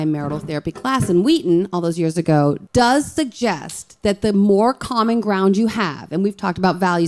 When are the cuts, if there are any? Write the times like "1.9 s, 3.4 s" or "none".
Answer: 2.6 s